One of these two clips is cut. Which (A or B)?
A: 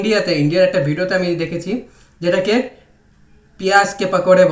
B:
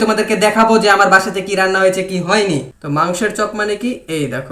B